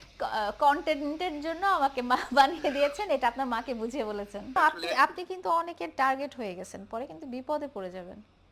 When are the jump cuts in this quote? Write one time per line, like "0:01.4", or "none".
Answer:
0:04.6